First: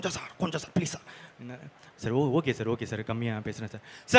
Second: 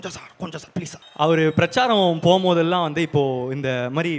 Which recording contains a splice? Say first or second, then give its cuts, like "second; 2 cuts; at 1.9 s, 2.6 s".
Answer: second; 1 cut; at 1.0 s